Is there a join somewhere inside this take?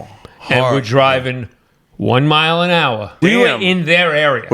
yes; 1 cut; at 3.1 s

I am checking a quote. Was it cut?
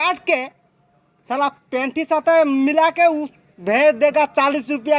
no; 0 cuts

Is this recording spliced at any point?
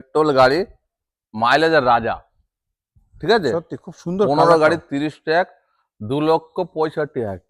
no; 0 cuts

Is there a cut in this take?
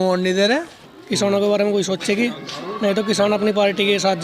yes; 1 cut; at 0.9 s

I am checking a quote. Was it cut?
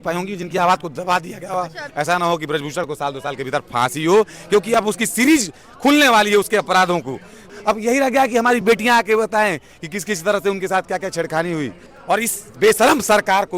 yes; 3 cuts; at 1.8 s, 7.5 s, 11.9 s

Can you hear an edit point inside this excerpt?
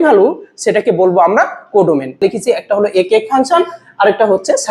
yes; 1 cut; at 2.2 s

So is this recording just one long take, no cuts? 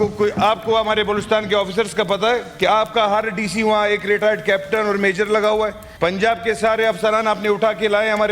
no; 1 cut; at 5.8 s

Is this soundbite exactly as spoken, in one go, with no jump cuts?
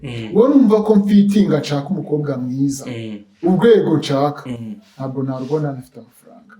yes; 0 cuts

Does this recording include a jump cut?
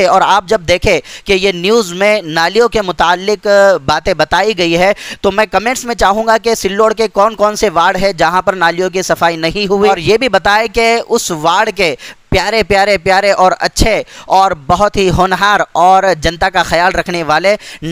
yes; 1 cut; at 9.9 s

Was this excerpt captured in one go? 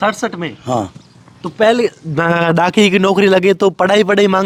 yes; 0 cuts

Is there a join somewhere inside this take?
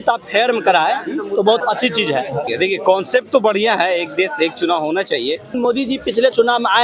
yes; 2 cuts; at 1.9 s, 5.6 s

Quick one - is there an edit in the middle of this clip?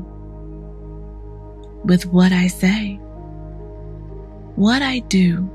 yes; 2 cuts; at 3.0 s, 4.5 s

